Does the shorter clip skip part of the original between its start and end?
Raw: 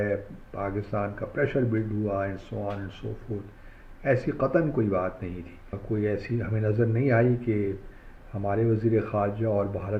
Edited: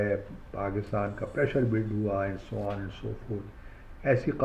no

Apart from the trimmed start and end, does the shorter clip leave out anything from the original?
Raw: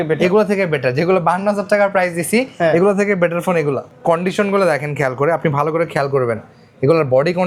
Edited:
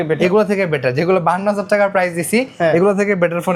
no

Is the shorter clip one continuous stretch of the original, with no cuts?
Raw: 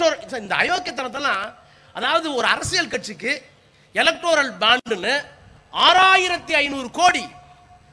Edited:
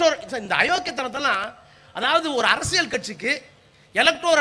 yes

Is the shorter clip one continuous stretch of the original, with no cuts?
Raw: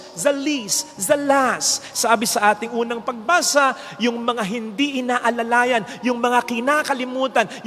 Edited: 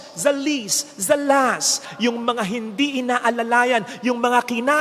no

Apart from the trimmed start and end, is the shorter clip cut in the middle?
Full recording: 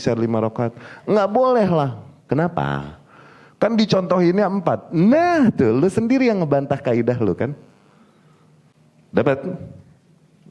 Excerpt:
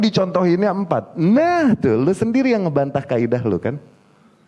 no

